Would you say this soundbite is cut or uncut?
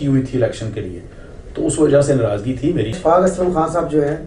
cut